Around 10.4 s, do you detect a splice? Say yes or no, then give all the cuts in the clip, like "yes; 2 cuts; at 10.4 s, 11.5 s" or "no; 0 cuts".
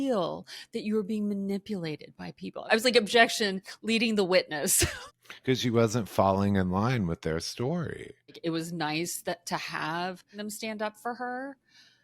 yes; 4 cuts; at 2.6 s, 5.0 s, 8.4 s, 10.4 s